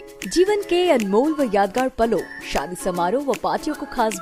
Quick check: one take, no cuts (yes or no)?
yes